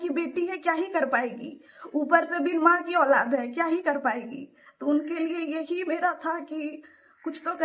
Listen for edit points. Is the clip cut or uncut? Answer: uncut